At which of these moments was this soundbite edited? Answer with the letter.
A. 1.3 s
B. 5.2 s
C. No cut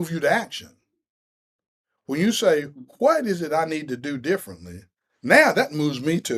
C